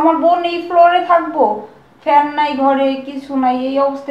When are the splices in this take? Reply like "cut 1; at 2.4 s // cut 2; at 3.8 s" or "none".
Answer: none